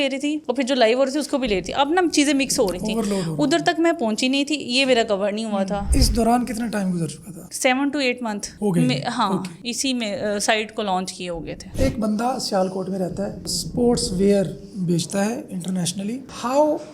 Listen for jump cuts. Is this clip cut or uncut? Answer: cut